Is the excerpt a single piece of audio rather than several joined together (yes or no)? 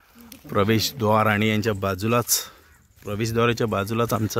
yes